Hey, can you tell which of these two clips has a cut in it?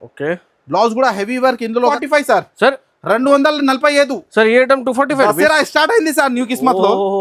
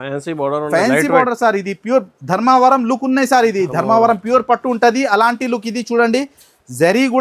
first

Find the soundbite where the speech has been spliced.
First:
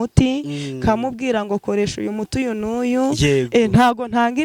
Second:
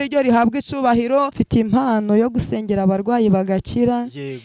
second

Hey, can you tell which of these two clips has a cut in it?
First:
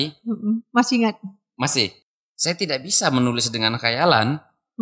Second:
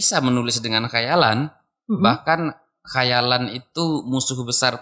first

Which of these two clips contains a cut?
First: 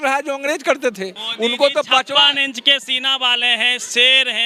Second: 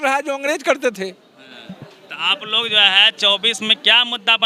first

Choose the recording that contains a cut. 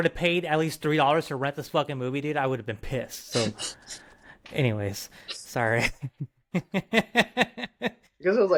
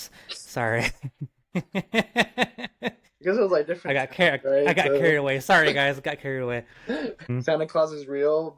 second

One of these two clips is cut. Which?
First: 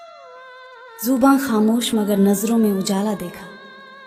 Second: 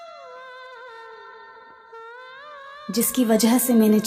first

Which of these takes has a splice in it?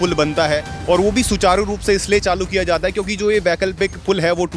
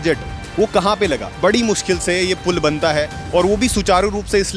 second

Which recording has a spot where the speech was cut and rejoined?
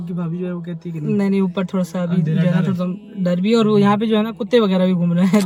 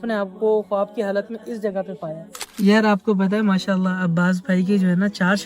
second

